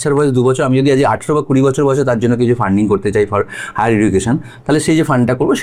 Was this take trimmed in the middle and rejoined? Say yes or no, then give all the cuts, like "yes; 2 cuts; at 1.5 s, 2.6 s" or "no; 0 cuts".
no; 0 cuts